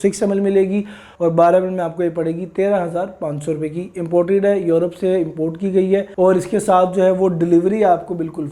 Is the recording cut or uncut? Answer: cut